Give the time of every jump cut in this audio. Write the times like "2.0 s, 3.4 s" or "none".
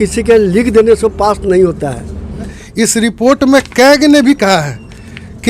2.5 s